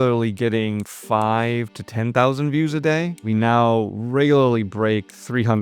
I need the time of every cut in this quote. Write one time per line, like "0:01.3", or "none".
0:03.2

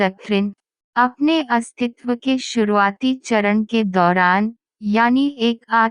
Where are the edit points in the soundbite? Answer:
none

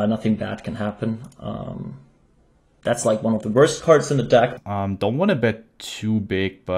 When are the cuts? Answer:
0:04.6

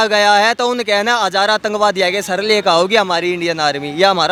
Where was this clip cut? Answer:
none

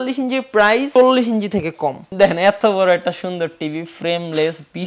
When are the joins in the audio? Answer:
0:00.9
0:02.0

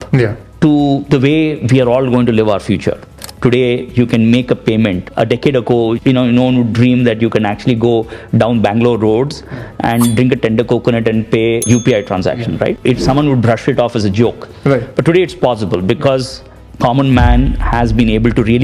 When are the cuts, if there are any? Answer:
0:03.2
0:05.0
0:06.0
0:11.7
0:12.8

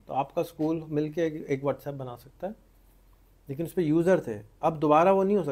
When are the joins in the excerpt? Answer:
none

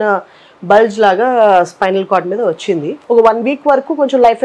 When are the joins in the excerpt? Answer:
0:02.9

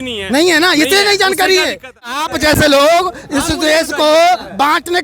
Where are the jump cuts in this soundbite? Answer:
0:02.1

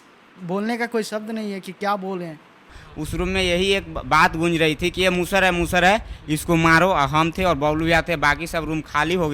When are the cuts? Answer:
0:02.8

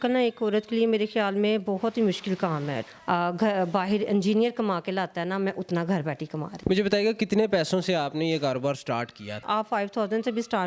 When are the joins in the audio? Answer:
0:02.8
0:06.5
0:09.5

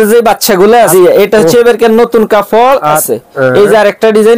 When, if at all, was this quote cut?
0:00.9
0:03.0

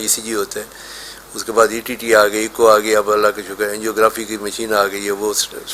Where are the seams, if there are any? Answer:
none

